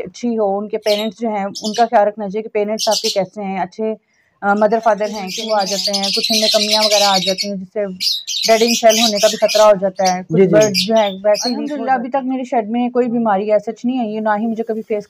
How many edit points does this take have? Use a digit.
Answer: 2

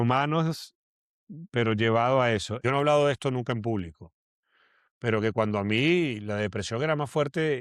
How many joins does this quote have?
1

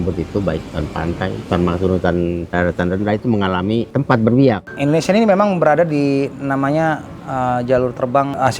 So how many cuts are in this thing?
1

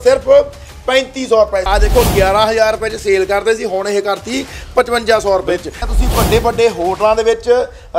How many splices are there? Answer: 2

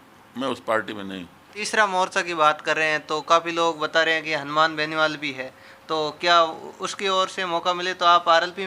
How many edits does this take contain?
1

